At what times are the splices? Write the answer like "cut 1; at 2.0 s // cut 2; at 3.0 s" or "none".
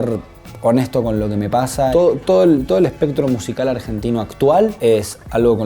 cut 1; at 1.9 s // cut 2; at 4.8 s

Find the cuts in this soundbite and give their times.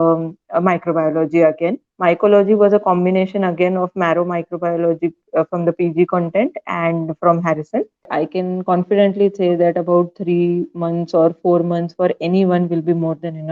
cut 1; at 1.9 s // cut 2; at 8.1 s

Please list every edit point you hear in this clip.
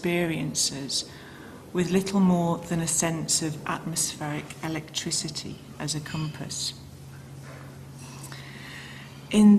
cut 1; at 2.0 s

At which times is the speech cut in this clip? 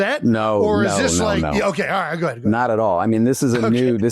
none

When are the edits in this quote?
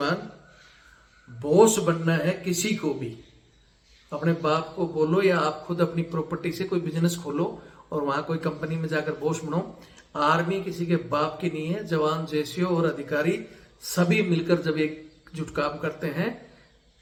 none

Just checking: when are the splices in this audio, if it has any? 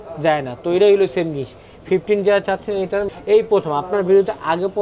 cut 1; at 3.1 s

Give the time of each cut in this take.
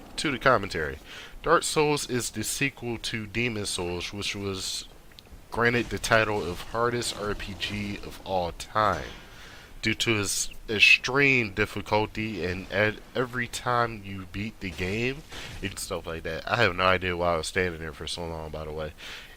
none

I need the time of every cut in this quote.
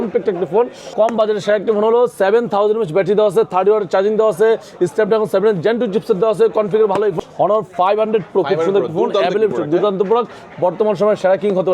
cut 1; at 0.9 s // cut 2; at 7.2 s

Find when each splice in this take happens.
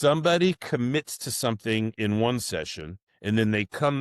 none

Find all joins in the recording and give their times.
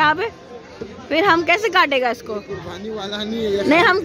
none

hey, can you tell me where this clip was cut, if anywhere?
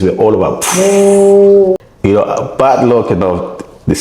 cut 1; at 1.8 s

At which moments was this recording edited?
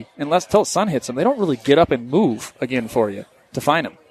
none

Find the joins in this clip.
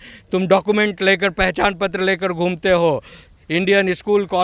none

